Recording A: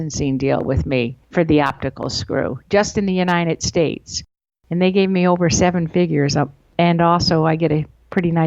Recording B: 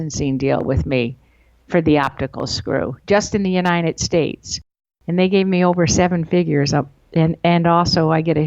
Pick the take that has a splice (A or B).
A